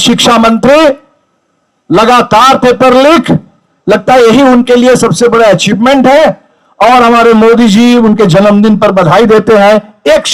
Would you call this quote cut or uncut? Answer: uncut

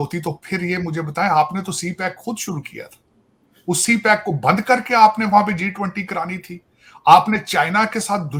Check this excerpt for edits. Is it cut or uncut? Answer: uncut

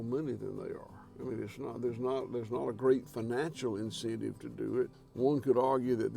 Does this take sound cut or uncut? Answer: cut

